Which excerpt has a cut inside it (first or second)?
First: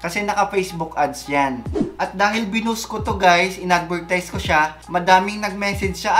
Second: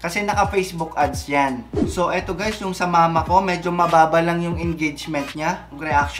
first